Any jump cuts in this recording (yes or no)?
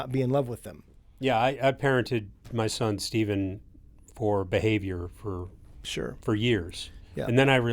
yes